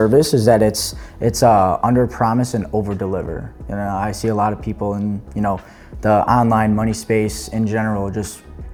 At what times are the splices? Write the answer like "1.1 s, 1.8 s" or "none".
none